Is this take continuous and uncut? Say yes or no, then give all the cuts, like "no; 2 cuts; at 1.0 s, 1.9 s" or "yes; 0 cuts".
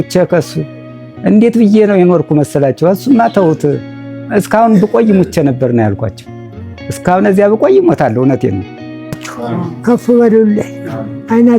no; 1 cut; at 9.2 s